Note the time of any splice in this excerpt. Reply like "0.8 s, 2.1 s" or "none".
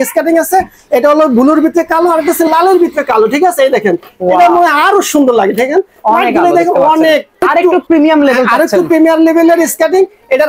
7.4 s